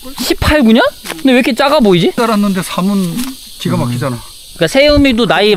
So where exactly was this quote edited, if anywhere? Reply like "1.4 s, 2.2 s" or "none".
2.2 s